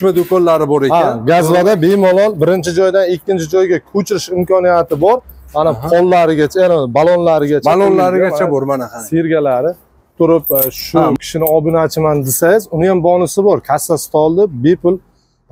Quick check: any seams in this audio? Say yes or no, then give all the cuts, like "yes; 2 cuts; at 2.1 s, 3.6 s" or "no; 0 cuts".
yes; 1 cut; at 10.0 s